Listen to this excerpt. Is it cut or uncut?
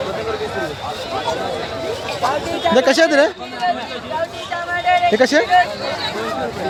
uncut